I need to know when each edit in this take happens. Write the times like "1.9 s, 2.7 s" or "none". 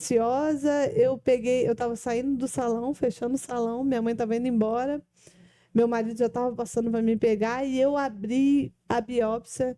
none